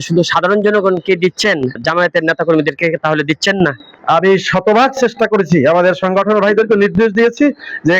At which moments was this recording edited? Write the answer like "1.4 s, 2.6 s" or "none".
1.8 s, 3.9 s